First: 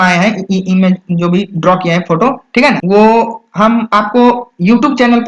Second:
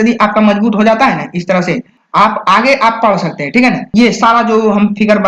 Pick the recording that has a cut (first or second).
second